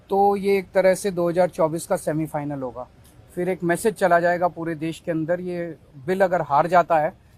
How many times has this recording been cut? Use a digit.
0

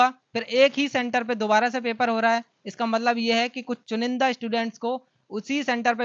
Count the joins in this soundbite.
0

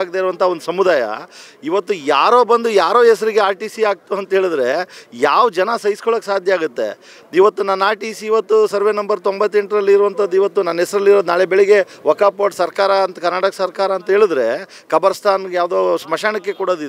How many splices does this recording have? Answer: 0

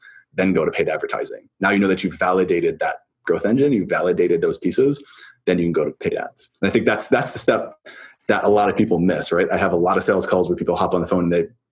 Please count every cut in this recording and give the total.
0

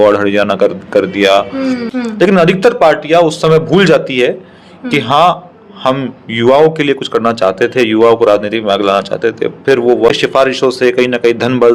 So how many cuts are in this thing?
2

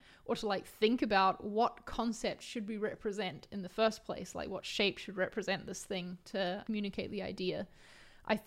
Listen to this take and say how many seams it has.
1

